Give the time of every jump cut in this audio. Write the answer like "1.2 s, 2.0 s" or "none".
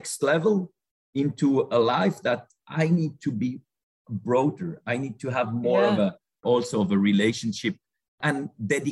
6.4 s